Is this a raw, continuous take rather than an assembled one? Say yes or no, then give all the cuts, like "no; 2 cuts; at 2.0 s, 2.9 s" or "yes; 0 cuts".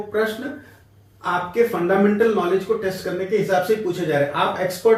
yes; 0 cuts